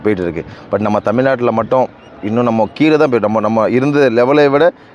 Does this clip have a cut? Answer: no; 0 cuts

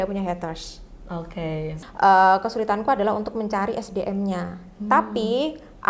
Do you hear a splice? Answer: yes; 1 cut; at 1.8 s

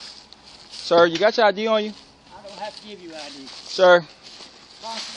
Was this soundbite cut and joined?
no; 0 cuts

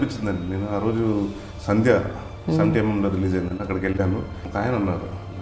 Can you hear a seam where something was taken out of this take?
yes; 2 cuts; at 1.5 s, 4.4 s

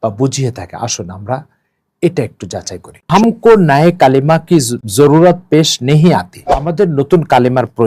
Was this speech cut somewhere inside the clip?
yes; 3 cuts; at 3.1 s, 4.8 s, 6.7 s

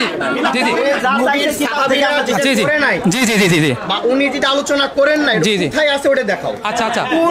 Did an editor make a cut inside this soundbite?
no; 0 cuts

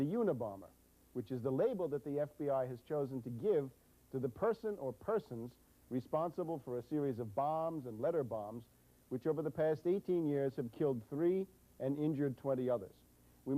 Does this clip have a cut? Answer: yes; 1 cut; at 1.3 s

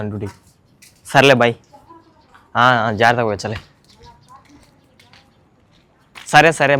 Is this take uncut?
yes; 0 cuts

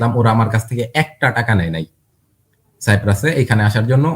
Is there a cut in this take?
no; 0 cuts

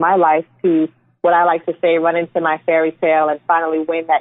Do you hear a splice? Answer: no; 0 cuts

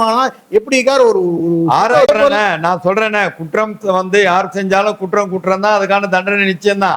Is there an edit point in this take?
yes; 1 cut; at 2.1 s

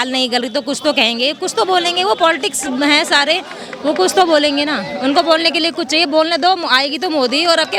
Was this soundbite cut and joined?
no; 0 cuts

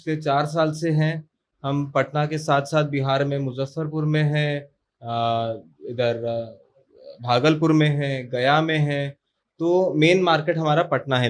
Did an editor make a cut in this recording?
no; 0 cuts

